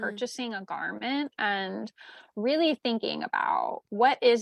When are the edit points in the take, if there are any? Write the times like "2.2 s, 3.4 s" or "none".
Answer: none